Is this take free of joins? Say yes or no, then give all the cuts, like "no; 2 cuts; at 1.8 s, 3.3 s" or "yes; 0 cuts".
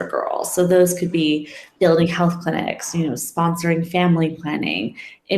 yes; 0 cuts